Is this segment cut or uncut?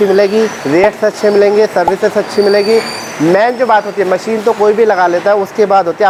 uncut